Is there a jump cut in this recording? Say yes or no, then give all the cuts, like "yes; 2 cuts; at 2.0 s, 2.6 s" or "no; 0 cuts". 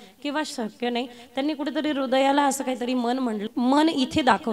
yes; 1 cut; at 3.4 s